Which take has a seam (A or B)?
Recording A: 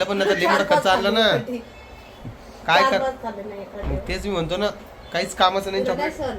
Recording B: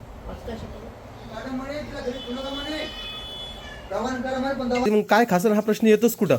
B